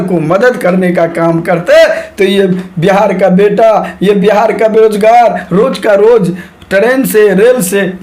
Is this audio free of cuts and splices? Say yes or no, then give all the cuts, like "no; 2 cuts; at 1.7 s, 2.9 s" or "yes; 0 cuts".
yes; 0 cuts